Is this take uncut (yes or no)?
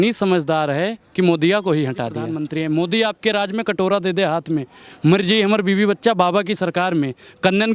no